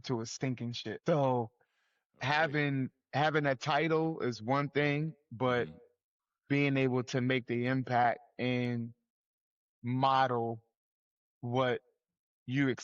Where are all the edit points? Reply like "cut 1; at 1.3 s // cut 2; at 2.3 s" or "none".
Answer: cut 1; at 0.9 s